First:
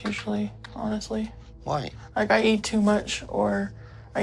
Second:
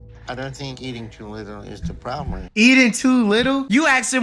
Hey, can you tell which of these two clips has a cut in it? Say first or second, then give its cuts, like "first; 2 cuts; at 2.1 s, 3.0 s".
second; 1 cut; at 2.4 s